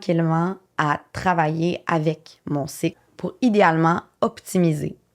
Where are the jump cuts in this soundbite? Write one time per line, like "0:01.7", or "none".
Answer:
0:03.1